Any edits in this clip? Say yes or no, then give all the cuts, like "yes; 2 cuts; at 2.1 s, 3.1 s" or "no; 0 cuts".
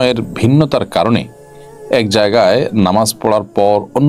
no; 0 cuts